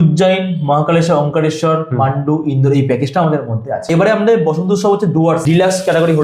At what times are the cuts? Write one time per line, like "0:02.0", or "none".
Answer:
0:03.8
0:05.4